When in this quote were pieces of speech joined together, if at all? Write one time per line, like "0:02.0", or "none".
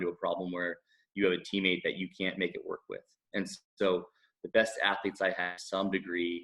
none